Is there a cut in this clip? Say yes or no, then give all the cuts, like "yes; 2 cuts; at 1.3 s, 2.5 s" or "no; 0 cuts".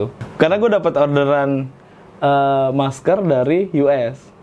no; 0 cuts